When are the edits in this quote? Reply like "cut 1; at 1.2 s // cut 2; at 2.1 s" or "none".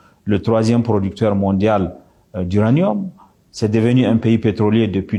none